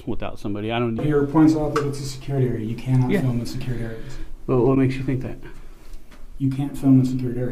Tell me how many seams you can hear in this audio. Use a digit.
1